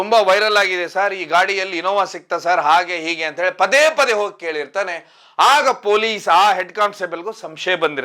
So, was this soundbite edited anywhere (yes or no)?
no